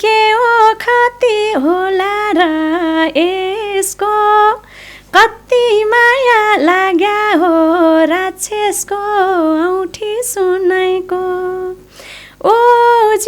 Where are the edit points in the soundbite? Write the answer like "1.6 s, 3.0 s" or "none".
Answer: none